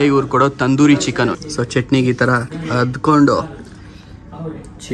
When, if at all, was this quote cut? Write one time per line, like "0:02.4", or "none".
0:01.3